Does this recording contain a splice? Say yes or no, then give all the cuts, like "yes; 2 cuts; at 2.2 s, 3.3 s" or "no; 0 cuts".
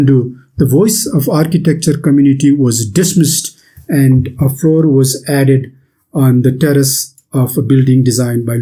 no; 0 cuts